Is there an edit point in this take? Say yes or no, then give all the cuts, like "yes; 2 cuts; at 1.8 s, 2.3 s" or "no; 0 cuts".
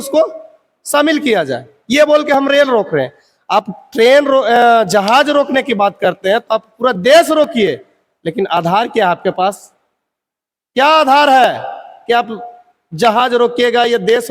no; 0 cuts